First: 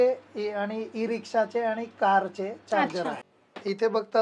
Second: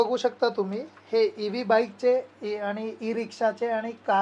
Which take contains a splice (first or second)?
first